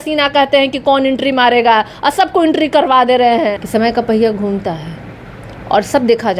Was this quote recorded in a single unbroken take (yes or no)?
no